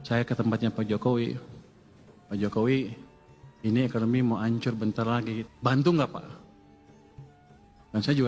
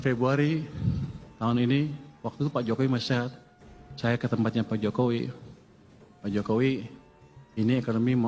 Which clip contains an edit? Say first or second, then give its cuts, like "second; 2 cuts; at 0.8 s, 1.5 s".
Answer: first; 1 cut; at 5.5 s